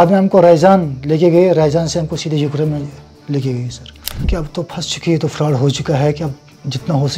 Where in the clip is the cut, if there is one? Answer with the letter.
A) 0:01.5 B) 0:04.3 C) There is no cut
B